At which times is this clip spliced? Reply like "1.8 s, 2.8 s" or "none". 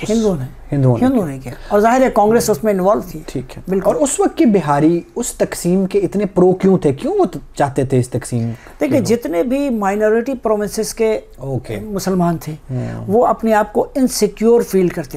none